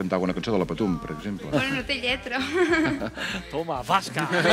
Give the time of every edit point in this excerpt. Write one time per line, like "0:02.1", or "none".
0:01.5